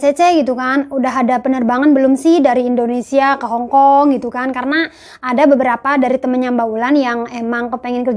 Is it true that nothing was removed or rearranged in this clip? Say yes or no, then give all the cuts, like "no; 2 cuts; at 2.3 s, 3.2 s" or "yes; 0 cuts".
yes; 0 cuts